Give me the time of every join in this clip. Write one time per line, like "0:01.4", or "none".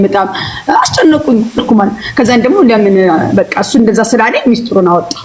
0:01.6